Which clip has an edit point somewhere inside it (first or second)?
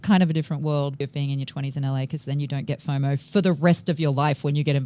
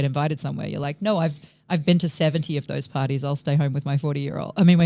first